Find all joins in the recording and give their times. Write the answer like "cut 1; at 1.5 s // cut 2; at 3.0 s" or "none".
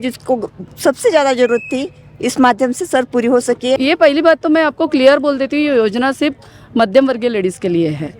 cut 1; at 3.8 s